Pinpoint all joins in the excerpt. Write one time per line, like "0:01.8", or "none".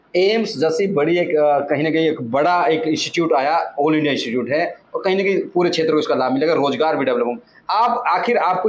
none